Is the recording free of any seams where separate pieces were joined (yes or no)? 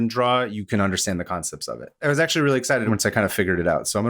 no